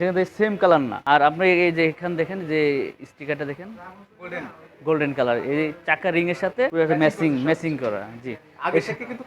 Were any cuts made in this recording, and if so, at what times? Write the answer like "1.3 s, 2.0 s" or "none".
1.0 s, 6.7 s